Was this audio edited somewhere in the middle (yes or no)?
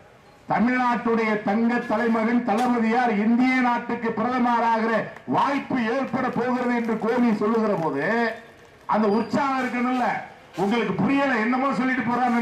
no